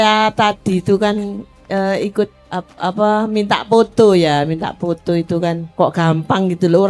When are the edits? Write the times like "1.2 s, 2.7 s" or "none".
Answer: 2.4 s, 5.7 s